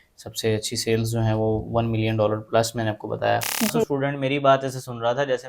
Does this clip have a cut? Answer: yes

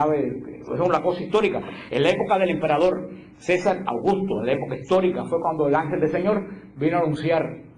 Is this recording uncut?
no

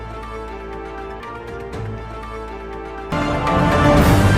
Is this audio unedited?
yes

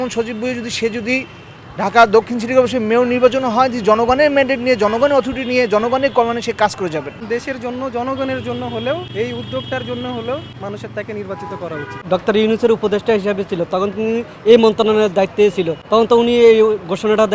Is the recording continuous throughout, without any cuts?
no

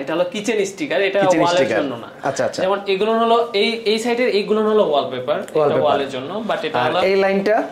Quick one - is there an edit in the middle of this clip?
no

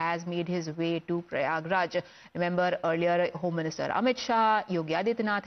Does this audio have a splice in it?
yes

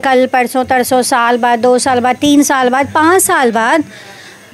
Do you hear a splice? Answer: no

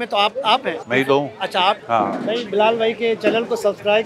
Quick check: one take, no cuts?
no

